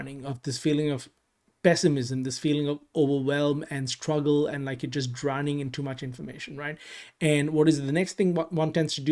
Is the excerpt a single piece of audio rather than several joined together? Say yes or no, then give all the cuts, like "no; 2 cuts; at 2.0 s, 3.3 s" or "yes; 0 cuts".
yes; 0 cuts